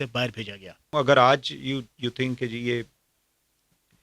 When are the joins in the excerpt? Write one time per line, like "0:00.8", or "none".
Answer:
0:00.9